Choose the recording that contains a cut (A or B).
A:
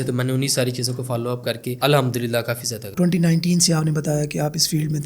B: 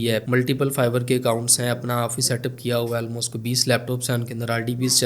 A